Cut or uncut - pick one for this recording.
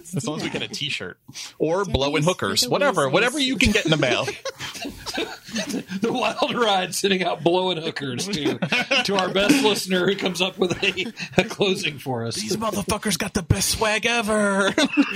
uncut